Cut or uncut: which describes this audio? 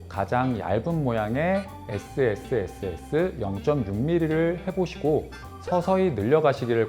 uncut